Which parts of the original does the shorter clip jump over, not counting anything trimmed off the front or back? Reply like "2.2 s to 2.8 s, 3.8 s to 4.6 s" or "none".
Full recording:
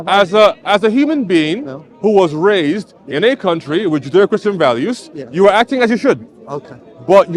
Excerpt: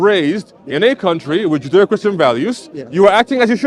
none

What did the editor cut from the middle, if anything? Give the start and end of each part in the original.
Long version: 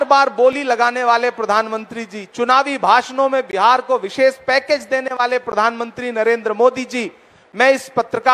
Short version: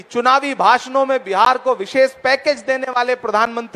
none

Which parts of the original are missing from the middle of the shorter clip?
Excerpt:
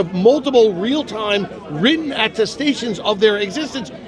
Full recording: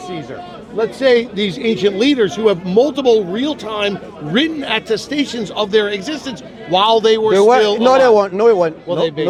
none

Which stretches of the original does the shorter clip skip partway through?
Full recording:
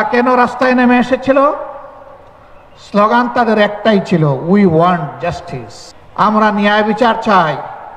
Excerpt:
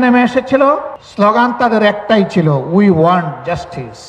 1.7 s to 2.7 s

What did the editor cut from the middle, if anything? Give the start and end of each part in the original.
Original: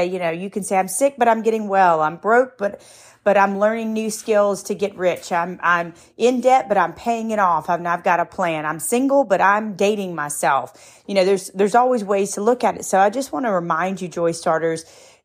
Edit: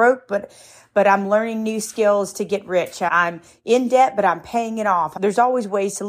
5.4 s to 5.6 s, 7.6 s to 11.5 s

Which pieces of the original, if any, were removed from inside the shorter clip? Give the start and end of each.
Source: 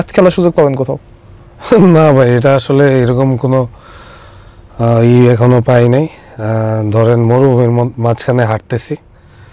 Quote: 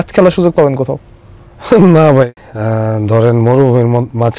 2.3 s to 6.1 s

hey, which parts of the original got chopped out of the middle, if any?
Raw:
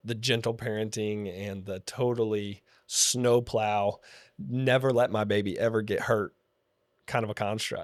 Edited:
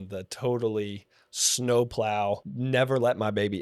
4.1 s to 4.5 s

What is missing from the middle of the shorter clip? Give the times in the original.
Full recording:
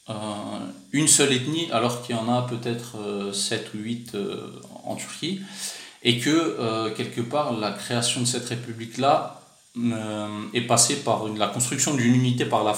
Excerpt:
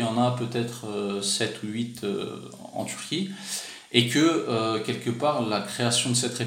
none

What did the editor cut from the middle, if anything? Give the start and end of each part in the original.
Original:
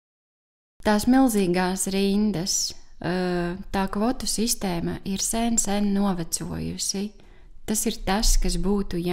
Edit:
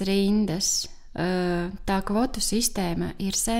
none

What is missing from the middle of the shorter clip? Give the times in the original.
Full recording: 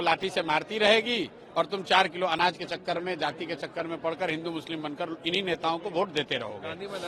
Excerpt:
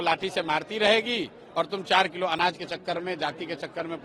none

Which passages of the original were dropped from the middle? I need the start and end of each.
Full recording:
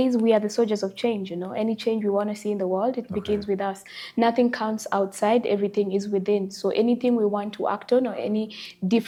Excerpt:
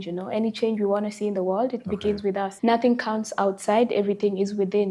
3.8 s to 4.1 s

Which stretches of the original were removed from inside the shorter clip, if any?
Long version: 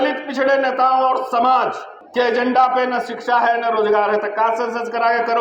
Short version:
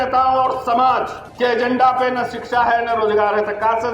1.9 s to 2.0 s

